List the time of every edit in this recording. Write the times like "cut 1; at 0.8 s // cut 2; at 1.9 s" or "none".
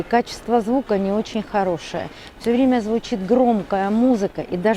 none